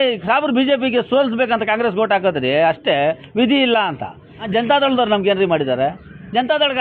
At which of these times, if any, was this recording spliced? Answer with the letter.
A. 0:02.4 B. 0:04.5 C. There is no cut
B